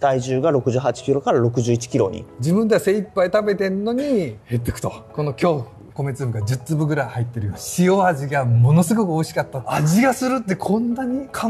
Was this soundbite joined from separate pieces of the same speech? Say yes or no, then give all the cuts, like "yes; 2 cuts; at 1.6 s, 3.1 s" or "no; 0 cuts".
yes; 4 cuts; at 2.3 s, 5.8 s, 7.6 s, 9.6 s